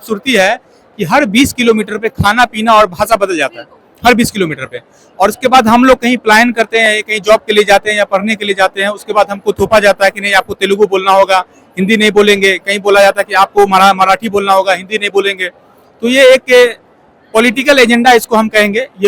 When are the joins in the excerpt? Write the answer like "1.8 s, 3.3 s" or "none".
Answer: none